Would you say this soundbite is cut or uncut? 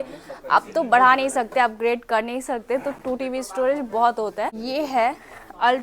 cut